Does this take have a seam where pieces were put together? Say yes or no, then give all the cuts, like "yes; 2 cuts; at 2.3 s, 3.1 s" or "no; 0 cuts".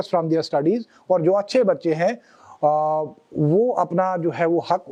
no; 0 cuts